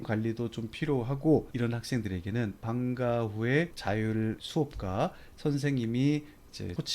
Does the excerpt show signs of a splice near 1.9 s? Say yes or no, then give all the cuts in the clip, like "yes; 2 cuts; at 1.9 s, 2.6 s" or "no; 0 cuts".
no; 1 cut; at 3.8 s